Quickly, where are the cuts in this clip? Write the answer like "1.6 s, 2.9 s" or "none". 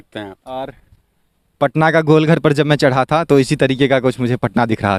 none